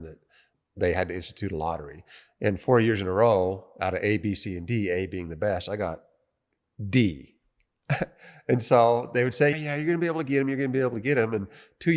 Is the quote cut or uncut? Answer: uncut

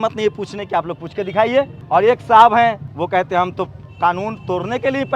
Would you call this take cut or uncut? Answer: cut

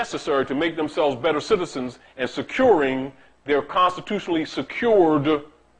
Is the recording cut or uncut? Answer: cut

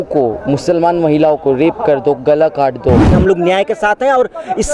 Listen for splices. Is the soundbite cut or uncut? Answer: cut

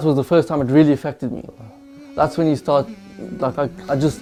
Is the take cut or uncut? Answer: uncut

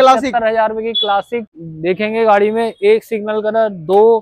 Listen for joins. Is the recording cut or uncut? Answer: cut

